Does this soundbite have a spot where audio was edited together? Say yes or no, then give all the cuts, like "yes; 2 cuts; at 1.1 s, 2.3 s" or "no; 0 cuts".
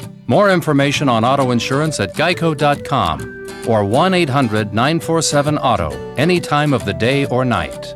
no; 0 cuts